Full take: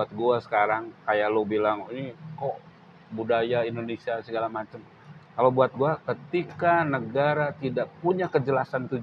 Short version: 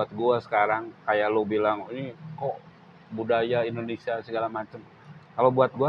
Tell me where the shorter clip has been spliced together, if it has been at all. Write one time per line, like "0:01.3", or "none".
none